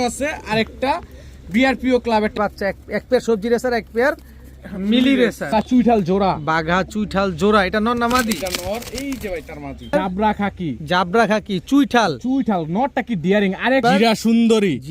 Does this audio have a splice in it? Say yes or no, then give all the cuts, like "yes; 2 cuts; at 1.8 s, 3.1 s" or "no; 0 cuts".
yes; 4 cuts; at 2.3 s, 5.5 s, 9.9 s, 13.8 s